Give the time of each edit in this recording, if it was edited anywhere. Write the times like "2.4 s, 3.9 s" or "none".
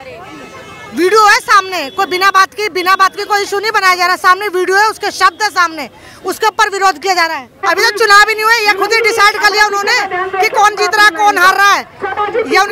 7.6 s